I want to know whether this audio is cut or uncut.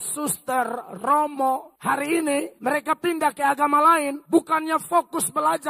cut